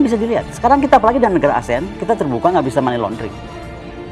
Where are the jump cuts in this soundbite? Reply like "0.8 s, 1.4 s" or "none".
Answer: 3.2 s